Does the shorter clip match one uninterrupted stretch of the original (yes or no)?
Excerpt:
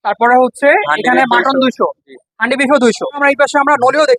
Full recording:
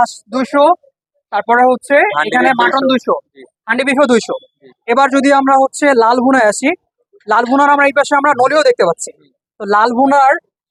no